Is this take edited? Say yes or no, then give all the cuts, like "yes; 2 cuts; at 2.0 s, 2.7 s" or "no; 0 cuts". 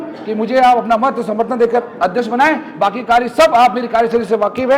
no; 0 cuts